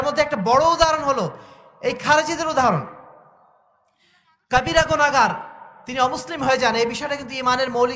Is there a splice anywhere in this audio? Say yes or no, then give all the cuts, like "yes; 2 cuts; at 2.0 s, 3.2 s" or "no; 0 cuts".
no; 0 cuts